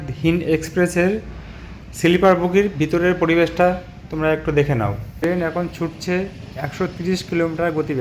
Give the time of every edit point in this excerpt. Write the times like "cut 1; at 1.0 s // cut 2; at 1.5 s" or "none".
cut 1; at 5.2 s